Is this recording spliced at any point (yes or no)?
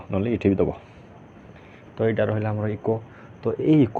no